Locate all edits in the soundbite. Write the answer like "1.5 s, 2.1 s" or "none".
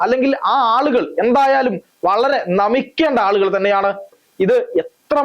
4.2 s